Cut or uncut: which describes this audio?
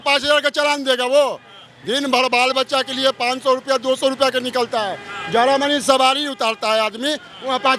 uncut